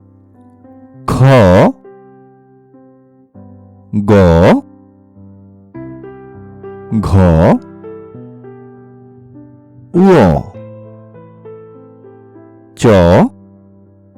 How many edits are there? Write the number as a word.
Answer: nine